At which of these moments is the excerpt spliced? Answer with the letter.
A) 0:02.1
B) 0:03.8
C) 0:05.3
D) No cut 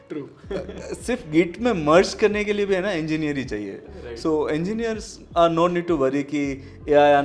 D